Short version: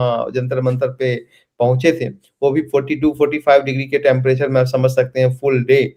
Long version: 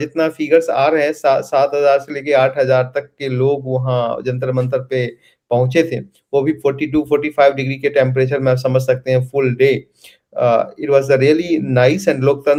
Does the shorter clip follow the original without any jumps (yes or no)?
yes